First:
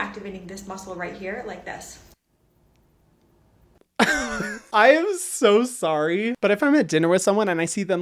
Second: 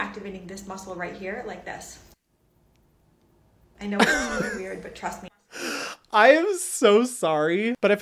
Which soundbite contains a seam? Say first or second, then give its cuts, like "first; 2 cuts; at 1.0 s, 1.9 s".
first; 1 cut; at 4.6 s